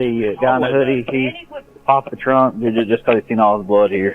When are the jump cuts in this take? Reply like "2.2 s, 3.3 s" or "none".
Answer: 1.5 s